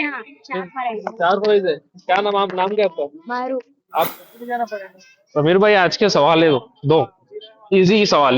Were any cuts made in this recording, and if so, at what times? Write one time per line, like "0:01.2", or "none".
0:04.1